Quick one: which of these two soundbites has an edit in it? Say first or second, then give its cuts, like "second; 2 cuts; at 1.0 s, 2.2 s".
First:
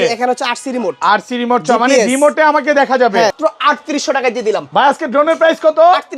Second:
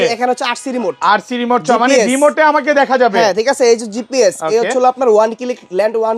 first; 1 cut; at 3.3 s